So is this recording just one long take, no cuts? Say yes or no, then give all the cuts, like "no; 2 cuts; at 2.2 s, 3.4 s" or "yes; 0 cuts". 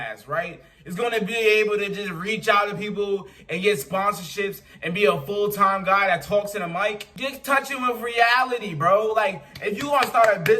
no; 1 cut; at 7.1 s